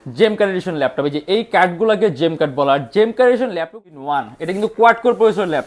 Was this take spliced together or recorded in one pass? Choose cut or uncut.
cut